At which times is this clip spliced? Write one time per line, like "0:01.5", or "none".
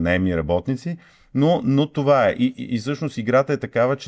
none